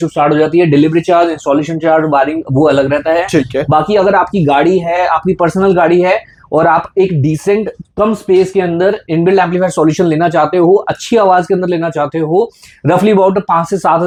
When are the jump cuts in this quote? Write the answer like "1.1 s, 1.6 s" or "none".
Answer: none